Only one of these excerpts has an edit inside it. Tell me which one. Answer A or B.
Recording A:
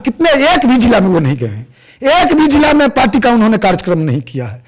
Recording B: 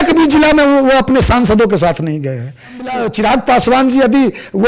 B